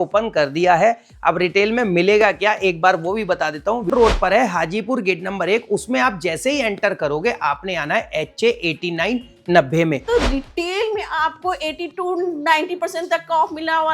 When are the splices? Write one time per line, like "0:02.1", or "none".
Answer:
0:03.9
0:10.0

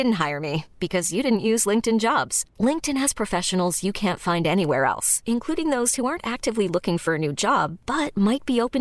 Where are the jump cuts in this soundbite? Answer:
none

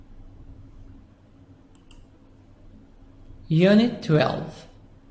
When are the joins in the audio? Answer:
0:04.0

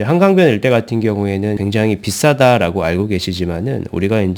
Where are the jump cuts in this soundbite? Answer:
none

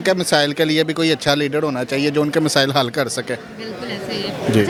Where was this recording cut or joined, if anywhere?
none

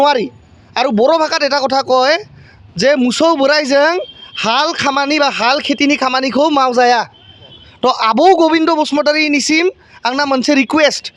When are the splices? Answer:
0:07.6

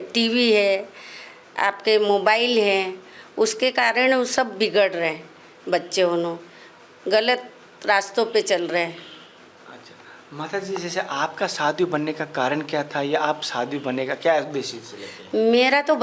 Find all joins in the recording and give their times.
none

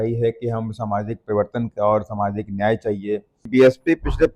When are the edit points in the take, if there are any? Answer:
0:03.4

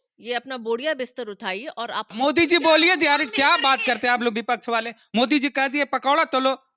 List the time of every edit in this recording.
0:02.1

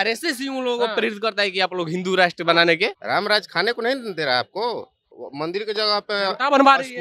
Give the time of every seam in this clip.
0:03.0
0:05.2

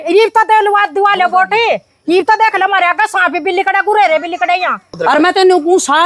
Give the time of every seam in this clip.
0:04.9

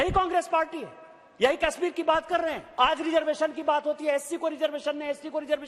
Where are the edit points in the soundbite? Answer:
0:02.6

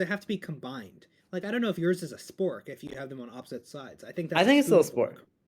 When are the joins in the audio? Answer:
0:04.4

